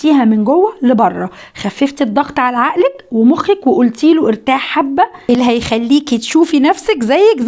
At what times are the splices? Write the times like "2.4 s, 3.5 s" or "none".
5.2 s